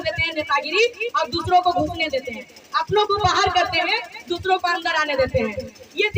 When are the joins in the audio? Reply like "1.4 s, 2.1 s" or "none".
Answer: none